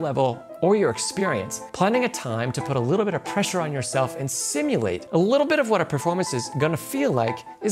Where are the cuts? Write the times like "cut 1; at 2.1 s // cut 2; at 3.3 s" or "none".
cut 1; at 1.6 s // cut 2; at 5.0 s